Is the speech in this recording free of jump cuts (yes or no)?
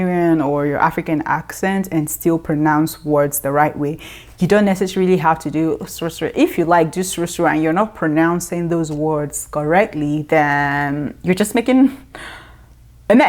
yes